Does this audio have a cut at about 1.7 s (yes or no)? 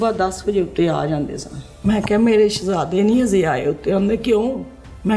yes